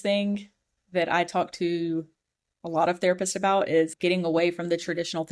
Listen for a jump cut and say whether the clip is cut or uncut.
cut